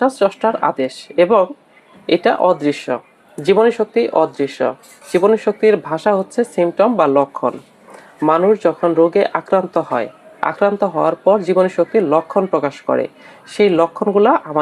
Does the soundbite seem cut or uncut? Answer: uncut